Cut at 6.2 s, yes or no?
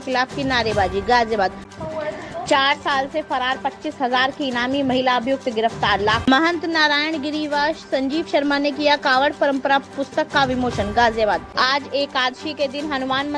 yes